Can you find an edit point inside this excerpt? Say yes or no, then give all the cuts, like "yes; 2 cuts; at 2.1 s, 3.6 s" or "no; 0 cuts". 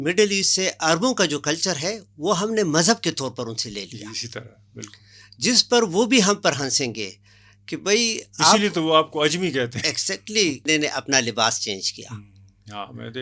yes; 1 cut; at 10.6 s